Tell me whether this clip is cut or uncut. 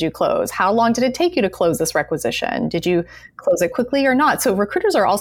uncut